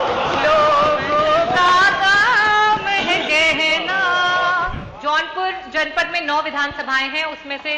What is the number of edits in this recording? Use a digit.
1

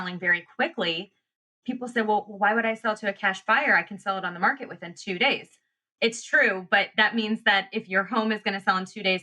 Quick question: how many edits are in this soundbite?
2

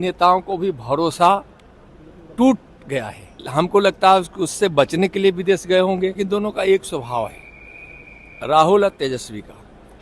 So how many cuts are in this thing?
2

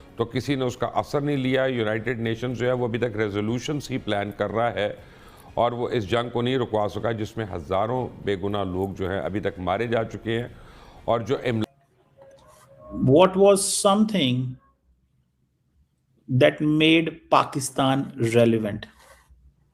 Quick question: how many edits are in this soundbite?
1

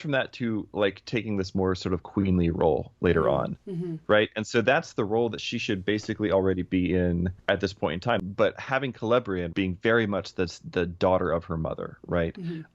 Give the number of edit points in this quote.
3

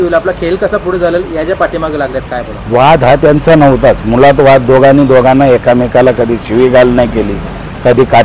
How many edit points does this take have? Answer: 0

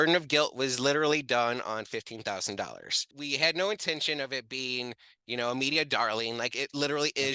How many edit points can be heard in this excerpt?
1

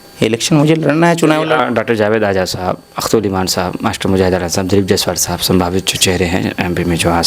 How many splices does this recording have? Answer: 1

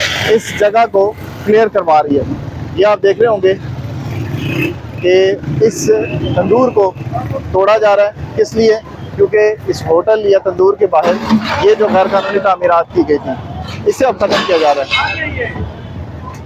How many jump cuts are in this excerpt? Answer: 0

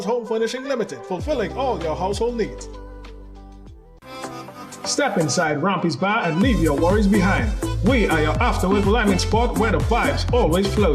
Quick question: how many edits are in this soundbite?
1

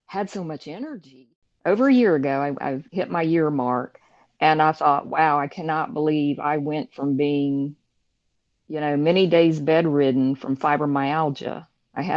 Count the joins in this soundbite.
1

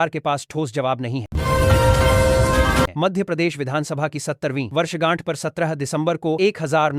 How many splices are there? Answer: 2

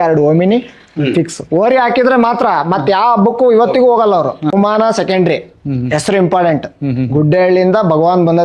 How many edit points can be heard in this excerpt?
1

